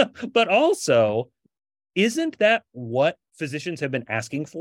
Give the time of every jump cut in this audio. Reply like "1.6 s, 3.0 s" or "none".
none